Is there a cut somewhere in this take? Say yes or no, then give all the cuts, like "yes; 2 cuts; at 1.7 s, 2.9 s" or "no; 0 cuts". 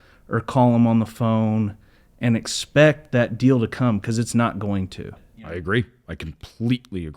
yes; 1 cut; at 5.3 s